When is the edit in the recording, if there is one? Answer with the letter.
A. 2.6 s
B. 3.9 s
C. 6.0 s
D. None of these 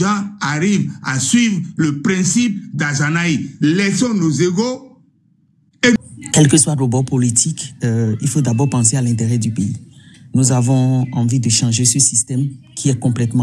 C